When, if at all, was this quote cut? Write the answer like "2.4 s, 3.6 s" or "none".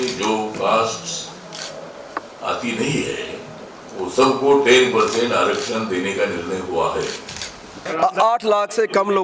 7.8 s